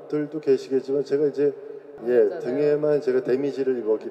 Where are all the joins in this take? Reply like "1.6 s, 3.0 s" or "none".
1.9 s